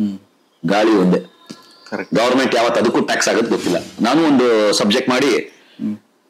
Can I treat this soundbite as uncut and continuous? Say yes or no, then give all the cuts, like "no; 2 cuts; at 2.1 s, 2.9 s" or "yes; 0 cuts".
no; 1 cut; at 3.9 s